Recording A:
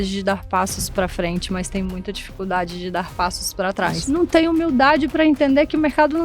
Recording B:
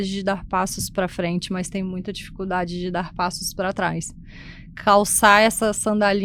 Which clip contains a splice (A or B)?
A